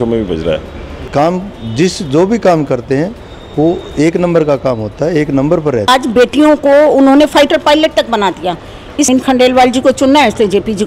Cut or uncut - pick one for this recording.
cut